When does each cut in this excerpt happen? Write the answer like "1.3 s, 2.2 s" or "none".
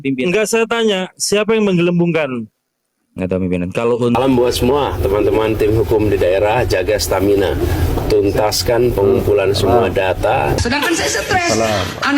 4.1 s, 10.6 s